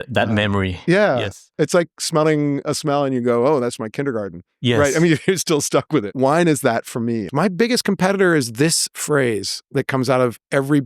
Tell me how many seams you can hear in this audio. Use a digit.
1